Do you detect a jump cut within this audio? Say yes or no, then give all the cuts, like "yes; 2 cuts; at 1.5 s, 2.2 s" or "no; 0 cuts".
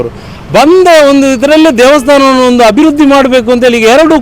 no; 0 cuts